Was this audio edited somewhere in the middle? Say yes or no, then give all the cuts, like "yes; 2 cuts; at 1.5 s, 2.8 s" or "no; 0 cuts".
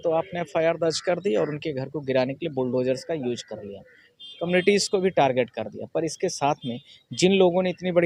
no; 0 cuts